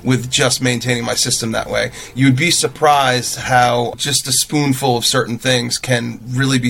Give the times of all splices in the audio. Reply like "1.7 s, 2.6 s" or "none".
3.9 s